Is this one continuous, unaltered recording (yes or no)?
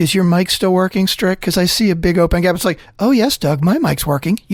yes